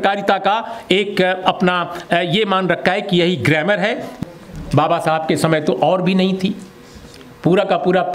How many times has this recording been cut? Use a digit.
1